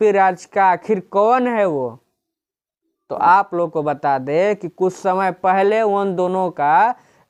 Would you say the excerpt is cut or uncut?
uncut